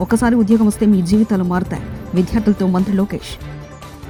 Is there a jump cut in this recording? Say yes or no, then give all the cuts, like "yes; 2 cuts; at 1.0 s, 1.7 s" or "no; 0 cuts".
no; 0 cuts